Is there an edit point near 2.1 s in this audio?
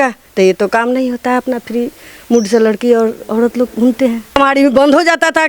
no; 1 cut; at 4.4 s

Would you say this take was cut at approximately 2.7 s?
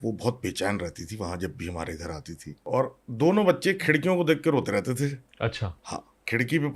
yes; 1 cut; at 2.7 s

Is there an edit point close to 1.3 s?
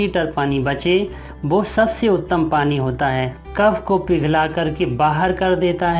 no; 1 cut; at 3.4 s

